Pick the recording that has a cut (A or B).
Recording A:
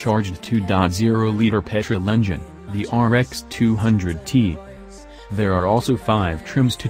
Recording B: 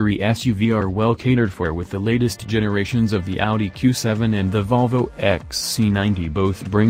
A